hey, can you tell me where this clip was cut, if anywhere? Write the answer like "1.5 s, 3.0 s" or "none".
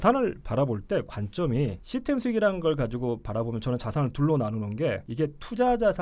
1.8 s, 5.1 s